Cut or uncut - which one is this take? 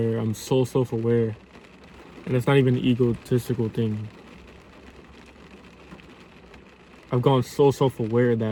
uncut